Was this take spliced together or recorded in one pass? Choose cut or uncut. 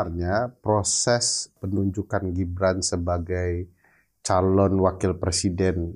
cut